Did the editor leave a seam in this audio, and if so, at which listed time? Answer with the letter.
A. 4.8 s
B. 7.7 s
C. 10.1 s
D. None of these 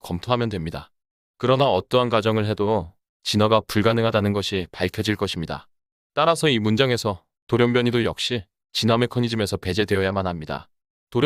D